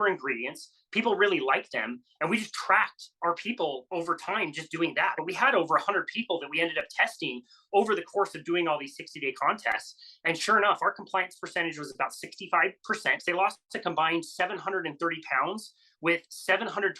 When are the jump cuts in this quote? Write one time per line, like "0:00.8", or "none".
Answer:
0:05.1
0:13.2